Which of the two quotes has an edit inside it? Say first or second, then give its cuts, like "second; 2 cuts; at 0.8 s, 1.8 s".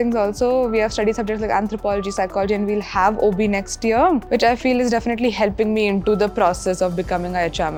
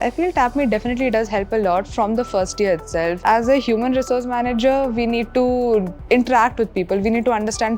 second; 1 cut; at 3.2 s